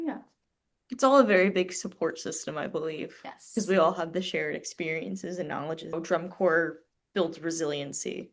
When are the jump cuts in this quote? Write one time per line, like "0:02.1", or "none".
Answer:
0:05.9